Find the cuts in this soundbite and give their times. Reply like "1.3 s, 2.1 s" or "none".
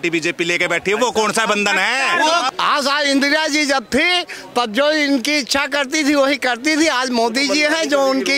2.5 s